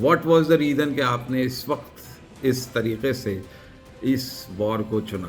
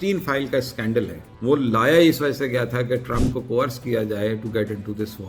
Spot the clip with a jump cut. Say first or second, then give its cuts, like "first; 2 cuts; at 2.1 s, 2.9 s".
second; 1 cut; at 1.2 s